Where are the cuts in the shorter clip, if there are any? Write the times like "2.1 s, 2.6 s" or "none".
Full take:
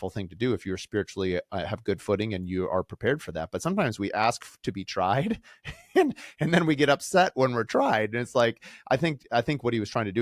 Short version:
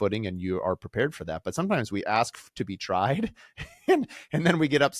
none